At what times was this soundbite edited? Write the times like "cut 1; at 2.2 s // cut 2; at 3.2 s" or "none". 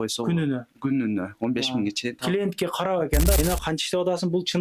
cut 1; at 3.4 s